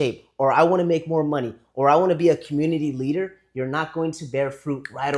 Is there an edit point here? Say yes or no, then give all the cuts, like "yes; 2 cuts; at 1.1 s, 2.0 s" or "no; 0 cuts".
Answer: no; 0 cuts